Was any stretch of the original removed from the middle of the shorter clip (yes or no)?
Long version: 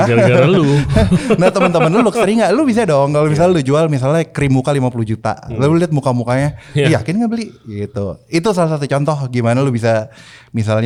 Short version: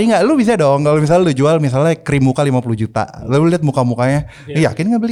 no